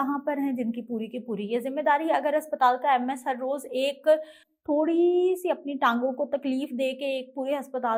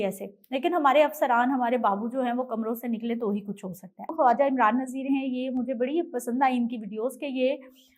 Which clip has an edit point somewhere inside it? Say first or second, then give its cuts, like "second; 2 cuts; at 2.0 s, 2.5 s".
second; 1 cut; at 4.1 s